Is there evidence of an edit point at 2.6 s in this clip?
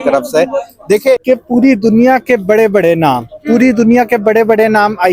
no; 1 cut; at 1.2 s

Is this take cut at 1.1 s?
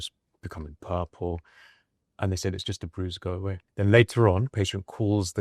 no; 1 cut; at 3.6 s

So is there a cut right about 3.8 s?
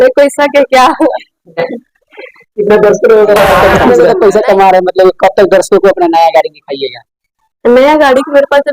yes; 1 cut; at 3.8 s

